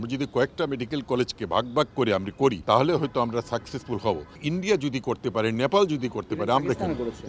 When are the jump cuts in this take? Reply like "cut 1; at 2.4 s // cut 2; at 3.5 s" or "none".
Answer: cut 1; at 2.6 s